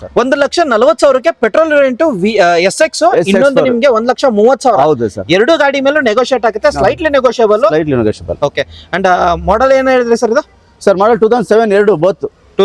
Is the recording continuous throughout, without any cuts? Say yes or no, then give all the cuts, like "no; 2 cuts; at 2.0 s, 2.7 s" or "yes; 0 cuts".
yes; 0 cuts